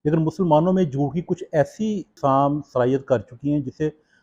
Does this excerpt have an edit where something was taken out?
no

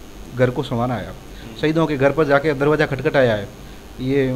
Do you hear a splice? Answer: no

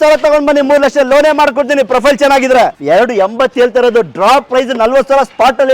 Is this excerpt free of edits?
no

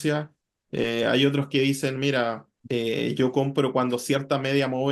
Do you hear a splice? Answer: yes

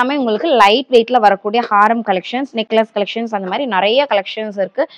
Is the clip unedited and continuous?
yes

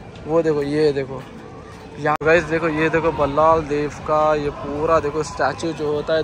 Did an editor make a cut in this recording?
yes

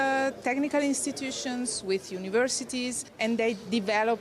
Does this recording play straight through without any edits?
yes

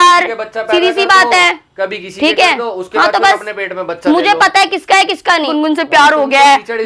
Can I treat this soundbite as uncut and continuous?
no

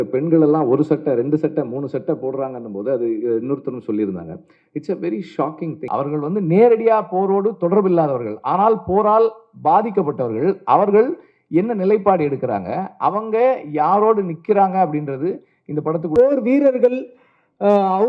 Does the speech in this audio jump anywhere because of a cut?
yes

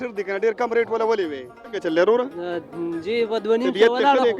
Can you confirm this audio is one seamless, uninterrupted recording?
no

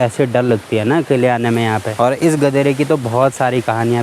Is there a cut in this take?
yes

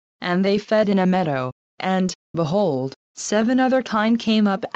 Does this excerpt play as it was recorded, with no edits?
no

